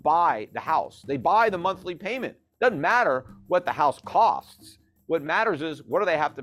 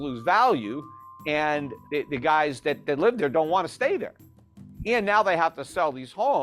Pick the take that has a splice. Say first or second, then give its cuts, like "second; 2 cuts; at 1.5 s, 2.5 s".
second; 1 cut; at 1.7 s